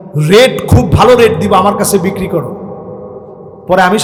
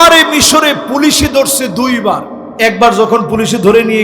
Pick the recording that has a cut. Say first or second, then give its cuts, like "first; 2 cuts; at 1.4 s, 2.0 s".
second; 1 cut; at 2.4 s